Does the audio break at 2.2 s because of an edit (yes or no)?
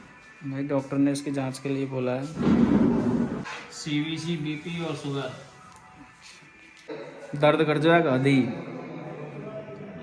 no